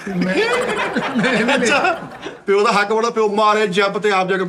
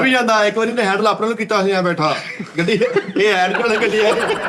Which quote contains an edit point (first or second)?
first